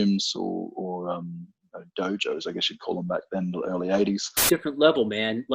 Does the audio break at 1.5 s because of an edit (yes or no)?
no